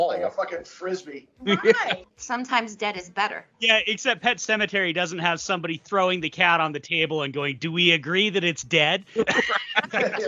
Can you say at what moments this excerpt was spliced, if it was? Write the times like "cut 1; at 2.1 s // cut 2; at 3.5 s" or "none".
cut 1; at 2.1 s // cut 2; at 3.5 s